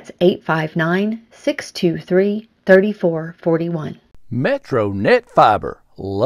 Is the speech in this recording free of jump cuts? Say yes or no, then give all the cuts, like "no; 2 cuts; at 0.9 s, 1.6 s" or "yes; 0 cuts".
no; 1 cut; at 4.1 s